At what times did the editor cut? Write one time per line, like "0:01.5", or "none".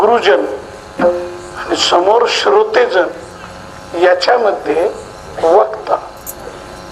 none